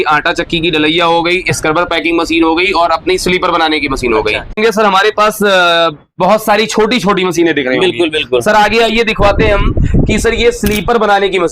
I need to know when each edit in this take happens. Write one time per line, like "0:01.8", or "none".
0:04.5